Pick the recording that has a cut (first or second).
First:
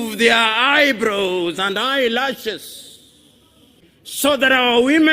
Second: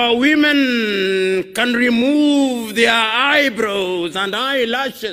first